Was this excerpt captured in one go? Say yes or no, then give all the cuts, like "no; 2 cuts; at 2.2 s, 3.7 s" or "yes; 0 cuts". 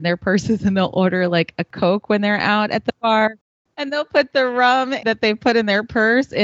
no; 3 cuts; at 1.7 s, 3.5 s, 5.0 s